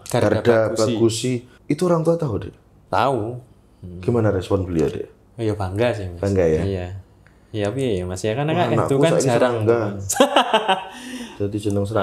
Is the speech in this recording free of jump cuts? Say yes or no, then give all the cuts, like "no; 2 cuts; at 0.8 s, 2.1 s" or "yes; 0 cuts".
no; 1 cut; at 1.5 s